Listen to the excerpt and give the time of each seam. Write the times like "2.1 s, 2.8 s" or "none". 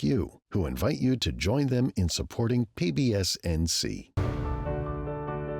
4.2 s